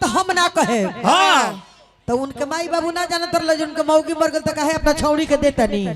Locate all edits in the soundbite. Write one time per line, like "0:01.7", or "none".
none